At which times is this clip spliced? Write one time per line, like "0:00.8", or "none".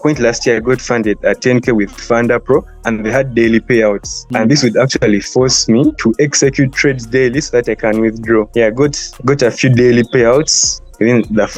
none